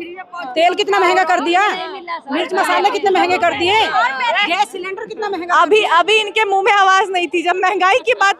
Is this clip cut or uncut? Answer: uncut